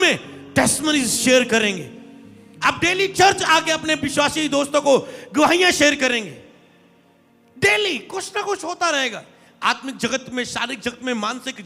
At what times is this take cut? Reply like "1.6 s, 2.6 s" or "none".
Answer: none